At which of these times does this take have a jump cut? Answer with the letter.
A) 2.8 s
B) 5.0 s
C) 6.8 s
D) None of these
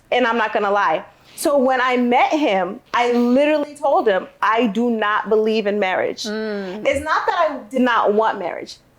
A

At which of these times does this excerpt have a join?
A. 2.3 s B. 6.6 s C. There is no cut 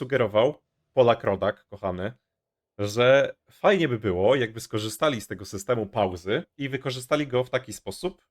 B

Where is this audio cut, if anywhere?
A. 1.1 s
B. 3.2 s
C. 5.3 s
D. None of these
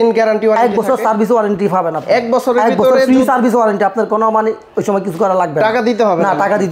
D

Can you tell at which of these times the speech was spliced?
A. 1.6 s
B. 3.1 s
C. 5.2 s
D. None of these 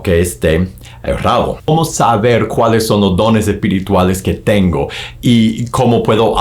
A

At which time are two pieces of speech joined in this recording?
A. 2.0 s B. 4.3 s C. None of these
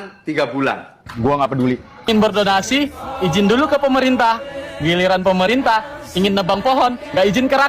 A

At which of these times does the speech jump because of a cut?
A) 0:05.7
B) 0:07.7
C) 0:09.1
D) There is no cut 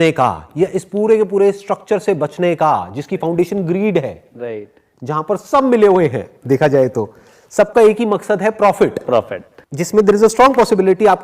C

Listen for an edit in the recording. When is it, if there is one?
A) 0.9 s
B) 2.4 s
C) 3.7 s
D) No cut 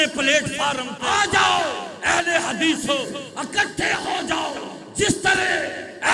A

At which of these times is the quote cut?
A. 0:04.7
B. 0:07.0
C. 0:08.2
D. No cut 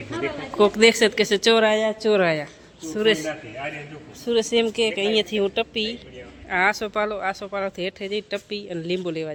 D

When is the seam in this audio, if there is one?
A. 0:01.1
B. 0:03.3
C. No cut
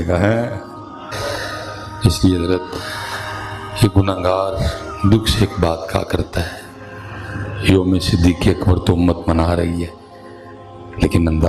A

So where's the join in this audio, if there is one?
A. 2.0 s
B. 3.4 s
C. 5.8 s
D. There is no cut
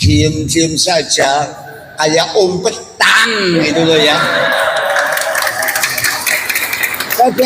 D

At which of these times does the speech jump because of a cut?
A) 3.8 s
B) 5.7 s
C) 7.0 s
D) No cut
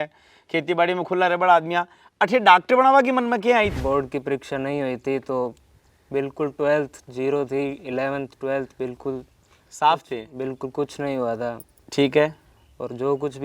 A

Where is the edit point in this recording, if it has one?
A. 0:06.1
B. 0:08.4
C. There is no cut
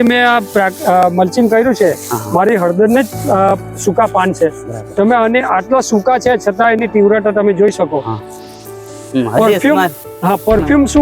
C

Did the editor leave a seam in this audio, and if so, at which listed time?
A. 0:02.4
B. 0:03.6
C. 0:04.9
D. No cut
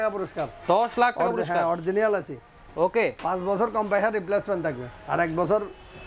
D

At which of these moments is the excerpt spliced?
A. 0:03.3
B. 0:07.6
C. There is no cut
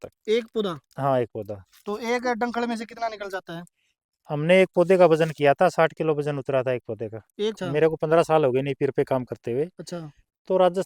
B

